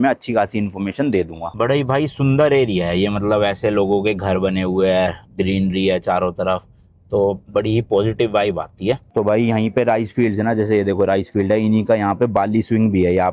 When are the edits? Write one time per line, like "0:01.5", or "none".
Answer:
0:01.4
0:09.1

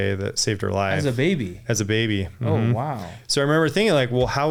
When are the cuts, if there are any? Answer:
none

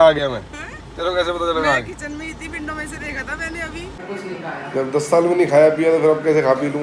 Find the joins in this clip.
0:03.9

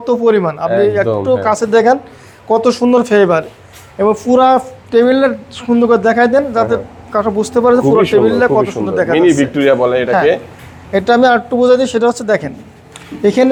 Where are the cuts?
none

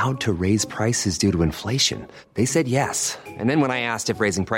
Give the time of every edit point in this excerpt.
none

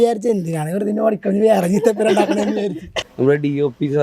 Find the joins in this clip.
0:03.0

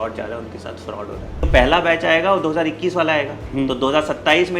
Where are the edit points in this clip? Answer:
0:01.5

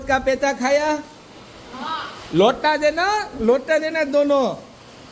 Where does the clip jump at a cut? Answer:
none

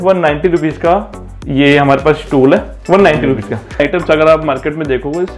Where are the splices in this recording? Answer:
0:03.8

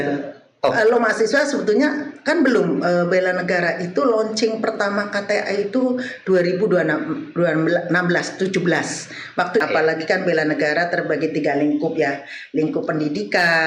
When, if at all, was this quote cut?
0:09.6

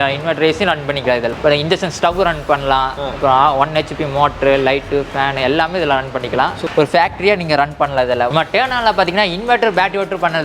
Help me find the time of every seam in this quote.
0:06.7
0:08.3

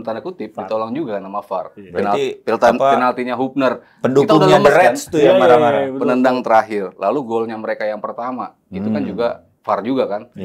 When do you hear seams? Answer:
none

